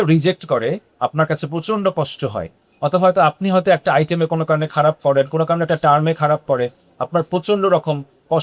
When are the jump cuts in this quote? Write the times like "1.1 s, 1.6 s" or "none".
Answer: none